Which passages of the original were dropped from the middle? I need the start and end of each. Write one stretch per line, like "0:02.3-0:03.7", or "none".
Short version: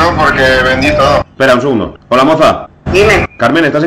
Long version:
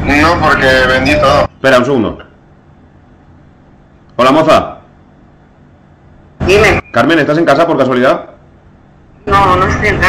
0:02.2-0:04.0
0:04.8-0:06.3